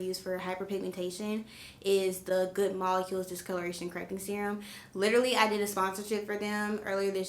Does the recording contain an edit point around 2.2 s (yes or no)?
no